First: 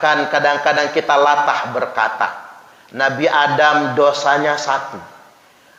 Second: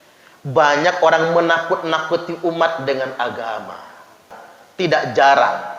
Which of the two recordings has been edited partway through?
second; 1 cut; at 4.4 s

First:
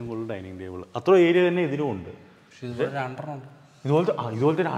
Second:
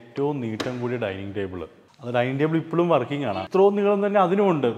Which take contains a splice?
second; 1 cut; at 3.4 s

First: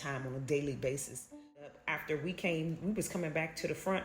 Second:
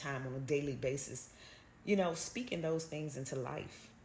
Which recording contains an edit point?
first; 1 cut; at 1.8 s

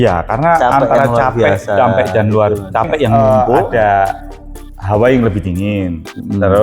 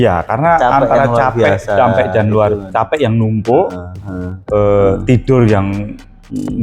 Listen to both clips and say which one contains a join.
first; 1 cut; at 3.5 s

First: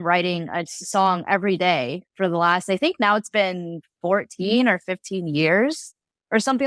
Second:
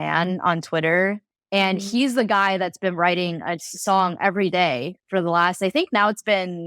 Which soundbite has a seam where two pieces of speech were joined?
second; 1 cut; at 1.2 s

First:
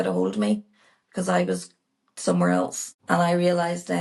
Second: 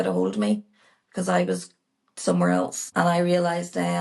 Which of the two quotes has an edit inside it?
second; 1 cut; at 2.8 s

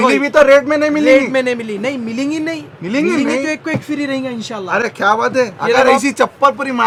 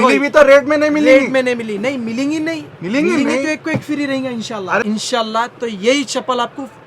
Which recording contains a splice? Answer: second; 1 cut; at 4.8 s

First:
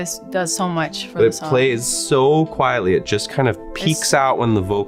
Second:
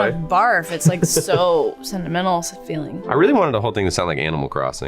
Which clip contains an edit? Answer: second; 1 cut; at 2.5 s

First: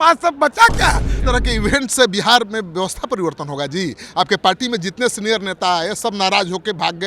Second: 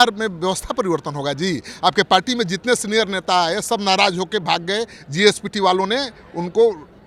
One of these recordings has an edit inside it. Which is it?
first; 1 cut; at 1.1 s

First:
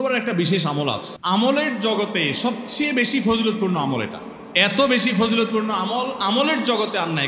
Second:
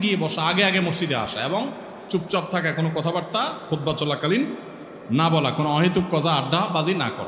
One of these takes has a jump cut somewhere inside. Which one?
first; 1 cut; at 1.1 s

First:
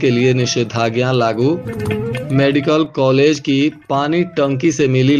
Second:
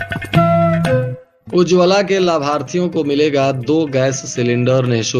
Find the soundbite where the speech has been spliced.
second; 1 cut; at 1.3 s

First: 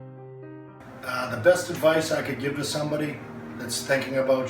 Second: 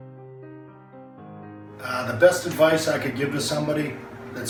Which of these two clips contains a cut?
first; 1 cut; at 1.0 s

